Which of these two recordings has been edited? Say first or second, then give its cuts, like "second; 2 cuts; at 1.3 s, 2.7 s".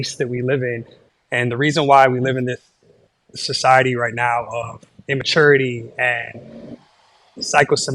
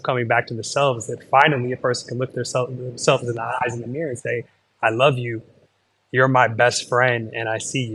first; 1 cut; at 1.0 s